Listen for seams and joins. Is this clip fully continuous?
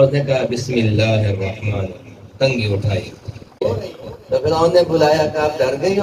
no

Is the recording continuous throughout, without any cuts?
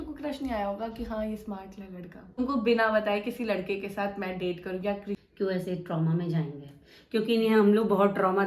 no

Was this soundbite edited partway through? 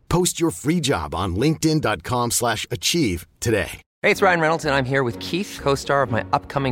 no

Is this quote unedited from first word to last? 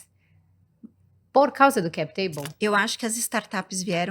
no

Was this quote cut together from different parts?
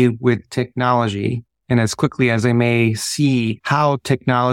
yes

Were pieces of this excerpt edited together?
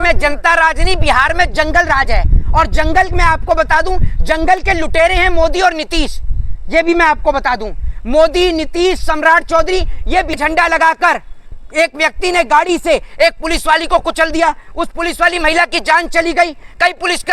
yes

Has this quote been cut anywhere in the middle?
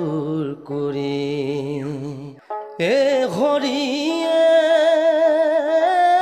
yes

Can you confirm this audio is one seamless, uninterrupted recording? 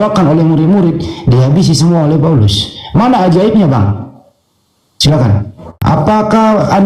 no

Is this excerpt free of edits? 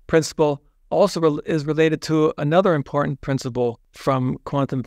no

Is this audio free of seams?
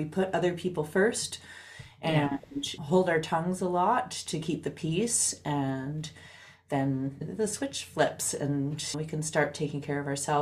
no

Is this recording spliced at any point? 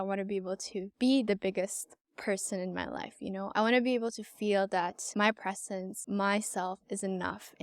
yes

